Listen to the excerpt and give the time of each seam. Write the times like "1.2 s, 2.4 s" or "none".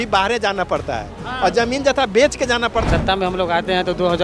2.9 s